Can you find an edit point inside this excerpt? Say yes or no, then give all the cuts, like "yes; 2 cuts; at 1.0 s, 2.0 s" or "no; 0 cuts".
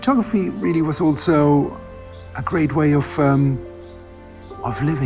no; 0 cuts